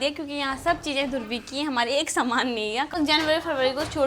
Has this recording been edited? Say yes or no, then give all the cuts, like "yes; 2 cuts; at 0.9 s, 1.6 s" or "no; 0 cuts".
yes; 1 cut; at 2.9 s